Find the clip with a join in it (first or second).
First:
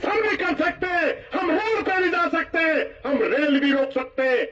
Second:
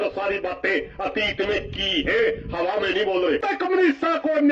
second